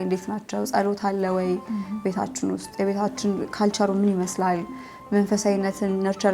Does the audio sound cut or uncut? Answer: uncut